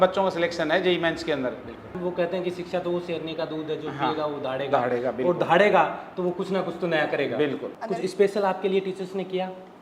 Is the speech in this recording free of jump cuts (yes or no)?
no